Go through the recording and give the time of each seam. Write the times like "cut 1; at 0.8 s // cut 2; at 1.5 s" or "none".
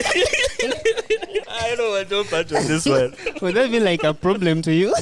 cut 1; at 1.4 s // cut 2; at 3.2 s